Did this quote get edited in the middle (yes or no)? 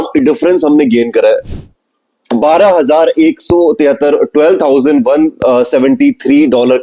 yes